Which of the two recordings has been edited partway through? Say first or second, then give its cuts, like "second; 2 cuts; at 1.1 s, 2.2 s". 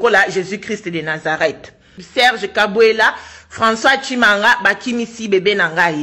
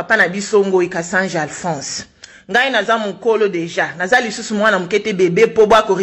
first; 1 cut; at 2.0 s